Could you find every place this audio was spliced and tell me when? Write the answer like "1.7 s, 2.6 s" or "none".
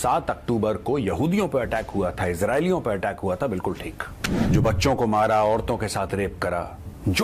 4.4 s